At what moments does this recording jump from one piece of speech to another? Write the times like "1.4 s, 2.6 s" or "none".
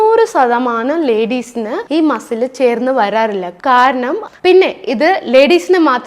4.2 s